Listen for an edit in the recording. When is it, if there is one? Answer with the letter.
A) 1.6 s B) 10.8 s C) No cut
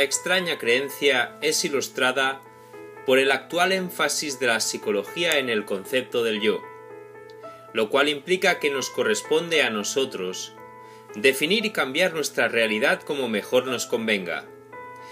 A